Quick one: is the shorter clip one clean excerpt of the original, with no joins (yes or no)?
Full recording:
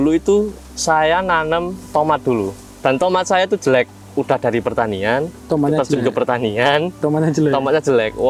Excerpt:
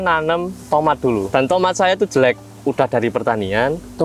no